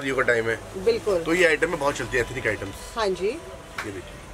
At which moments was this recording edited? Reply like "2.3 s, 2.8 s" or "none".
none